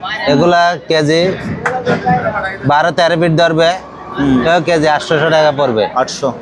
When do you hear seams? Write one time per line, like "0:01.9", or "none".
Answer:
none